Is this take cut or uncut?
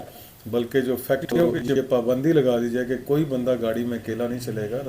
cut